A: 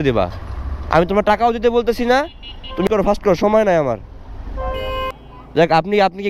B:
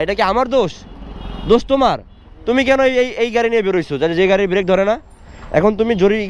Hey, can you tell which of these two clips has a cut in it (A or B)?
A